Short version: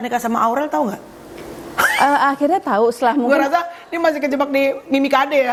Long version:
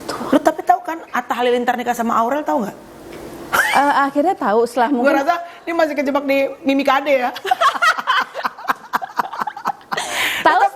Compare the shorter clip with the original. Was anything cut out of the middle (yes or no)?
no